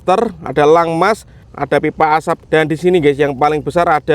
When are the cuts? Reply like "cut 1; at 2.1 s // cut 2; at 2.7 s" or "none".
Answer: cut 1; at 1.5 s // cut 2; at 2.4 s